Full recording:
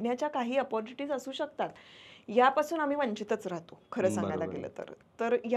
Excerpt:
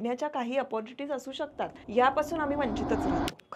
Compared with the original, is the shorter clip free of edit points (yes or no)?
no